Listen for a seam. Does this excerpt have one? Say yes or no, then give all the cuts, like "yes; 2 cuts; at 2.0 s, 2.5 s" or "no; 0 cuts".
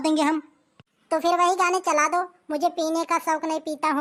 no; 0 cuts